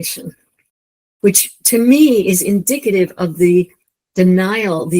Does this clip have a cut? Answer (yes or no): yes